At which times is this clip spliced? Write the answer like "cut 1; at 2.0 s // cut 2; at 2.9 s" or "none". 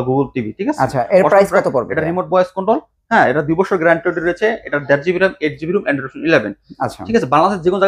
none